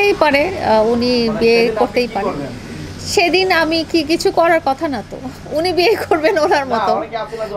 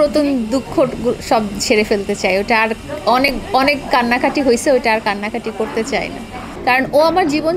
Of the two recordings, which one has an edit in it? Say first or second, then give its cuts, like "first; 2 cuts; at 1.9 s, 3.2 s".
second; 1 cut; at 6.4 s